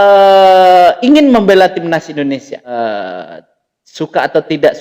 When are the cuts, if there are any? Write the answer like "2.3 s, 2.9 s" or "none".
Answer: 2.7 s